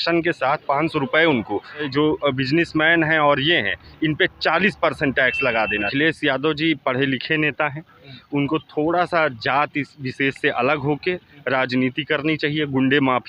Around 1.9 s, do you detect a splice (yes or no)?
yes